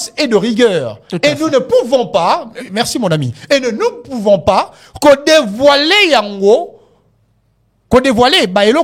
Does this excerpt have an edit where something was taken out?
no; 0 cuts

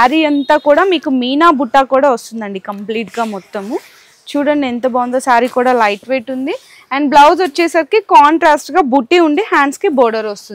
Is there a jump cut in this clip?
no; 0 cuts

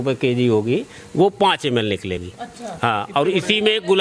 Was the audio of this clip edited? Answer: no; 0 cuts

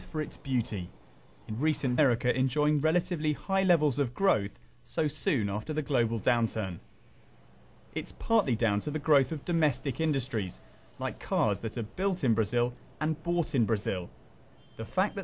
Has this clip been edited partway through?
no; 0 cuts

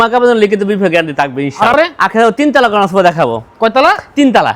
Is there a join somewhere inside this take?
yes; 1 cut; at 1.7 s

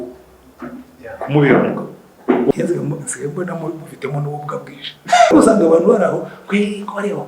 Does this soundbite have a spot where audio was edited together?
yes; 2 cuts; at 2.5 s, 5.3 s

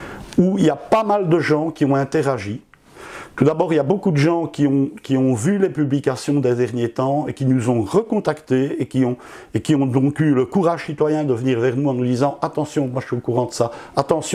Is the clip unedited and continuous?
yes; 0 cuts

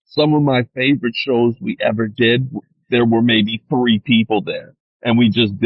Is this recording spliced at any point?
no; 0 cuts

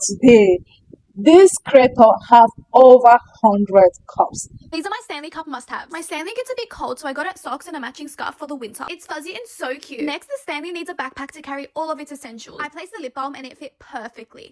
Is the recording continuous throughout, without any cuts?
no; 1 cut; at 4.5 s

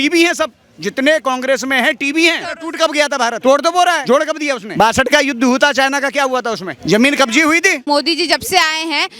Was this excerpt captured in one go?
no; 3 cuts; at 2.5 s, 4.0 s, 7.8 s

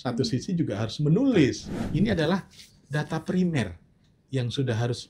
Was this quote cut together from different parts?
yes; 1 cut; at 1.7 s

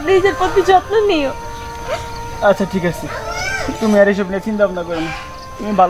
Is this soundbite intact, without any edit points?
yes; 0 cuts

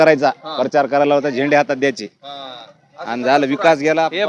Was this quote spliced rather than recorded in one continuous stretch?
no; 0 cuts

